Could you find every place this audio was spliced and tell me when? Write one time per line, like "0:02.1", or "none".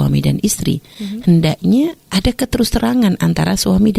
none